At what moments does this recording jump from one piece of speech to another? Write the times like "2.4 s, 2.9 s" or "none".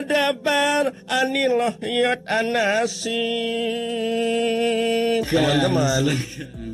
5.3 s